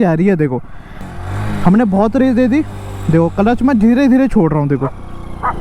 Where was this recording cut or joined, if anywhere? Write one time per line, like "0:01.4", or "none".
0:01.1